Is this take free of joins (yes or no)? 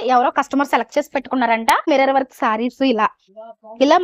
no